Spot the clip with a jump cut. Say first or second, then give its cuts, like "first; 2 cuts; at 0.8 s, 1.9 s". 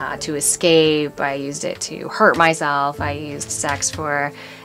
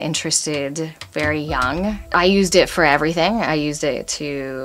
second; 1 cut; at 2.1 s